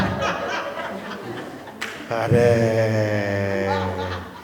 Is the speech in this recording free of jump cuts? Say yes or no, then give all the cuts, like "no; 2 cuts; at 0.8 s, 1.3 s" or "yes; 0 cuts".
yes; 0 cuts